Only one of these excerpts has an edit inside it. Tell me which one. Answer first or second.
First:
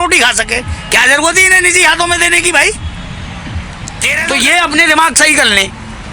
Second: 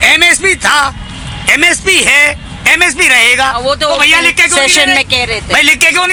first